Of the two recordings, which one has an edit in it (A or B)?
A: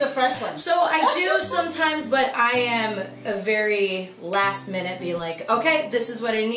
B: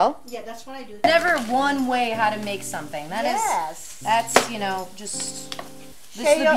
B